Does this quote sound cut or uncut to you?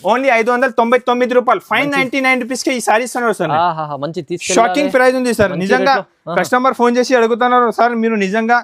uncut